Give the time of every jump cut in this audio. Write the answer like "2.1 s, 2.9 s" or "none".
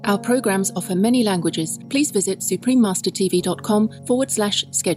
1.7 s, 4.0 s